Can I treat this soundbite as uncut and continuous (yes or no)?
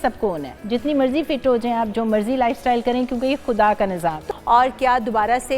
no